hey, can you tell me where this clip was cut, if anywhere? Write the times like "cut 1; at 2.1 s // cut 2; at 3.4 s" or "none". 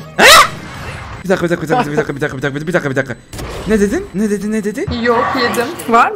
cut 1; at 4.9 s